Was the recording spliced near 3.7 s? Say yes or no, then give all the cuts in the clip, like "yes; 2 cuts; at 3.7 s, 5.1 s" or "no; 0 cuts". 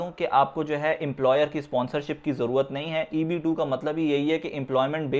no; 0 cuts